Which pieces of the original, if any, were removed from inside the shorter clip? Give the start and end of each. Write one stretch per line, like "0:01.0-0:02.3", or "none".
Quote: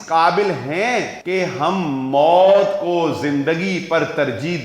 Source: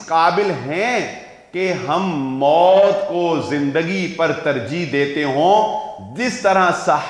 0:01.2-0:01.4